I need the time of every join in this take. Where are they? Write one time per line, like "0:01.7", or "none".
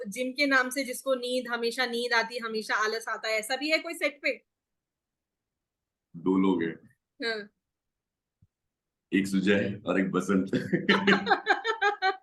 none